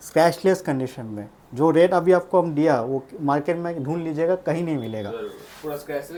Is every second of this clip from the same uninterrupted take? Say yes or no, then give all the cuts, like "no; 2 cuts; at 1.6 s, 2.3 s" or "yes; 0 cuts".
yes; 0 cuts